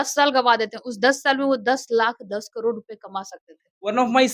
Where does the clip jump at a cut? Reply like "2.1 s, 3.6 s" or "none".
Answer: none